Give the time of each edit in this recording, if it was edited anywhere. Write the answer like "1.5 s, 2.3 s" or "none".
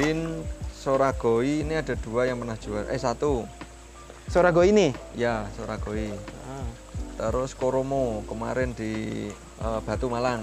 9.5 s